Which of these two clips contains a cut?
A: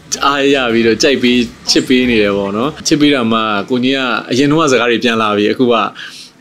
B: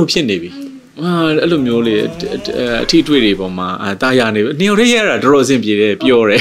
A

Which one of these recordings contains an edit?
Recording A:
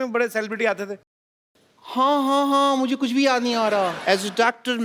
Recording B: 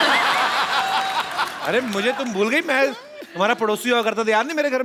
A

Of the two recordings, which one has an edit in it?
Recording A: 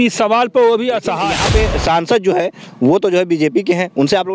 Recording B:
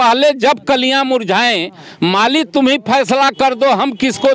A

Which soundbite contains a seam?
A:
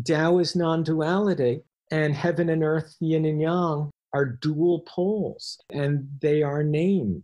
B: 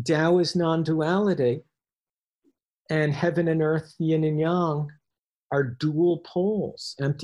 A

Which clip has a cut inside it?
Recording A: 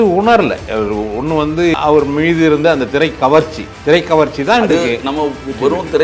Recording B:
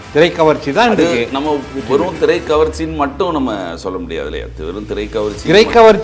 A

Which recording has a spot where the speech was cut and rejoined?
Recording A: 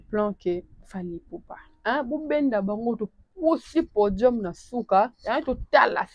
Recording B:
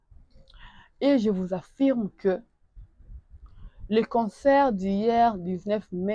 A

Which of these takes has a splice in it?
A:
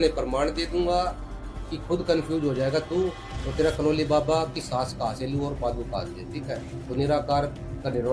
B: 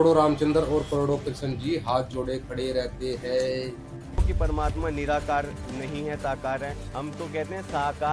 B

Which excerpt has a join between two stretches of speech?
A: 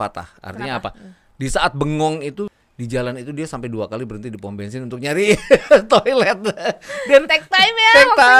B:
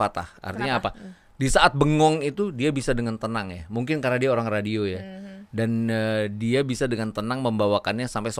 A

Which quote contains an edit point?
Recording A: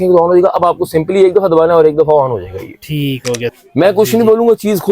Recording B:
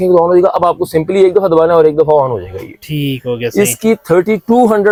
A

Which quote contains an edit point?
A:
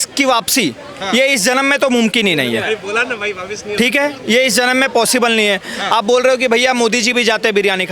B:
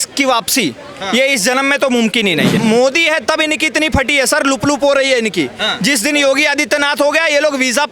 B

